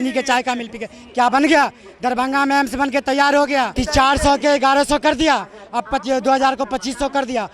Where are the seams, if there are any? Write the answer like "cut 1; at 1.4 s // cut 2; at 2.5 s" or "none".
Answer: cut 1; at 3.7 s